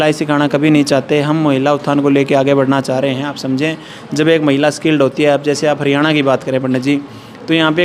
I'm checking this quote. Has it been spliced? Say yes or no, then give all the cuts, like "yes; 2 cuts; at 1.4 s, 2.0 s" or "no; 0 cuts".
no; 0 cuts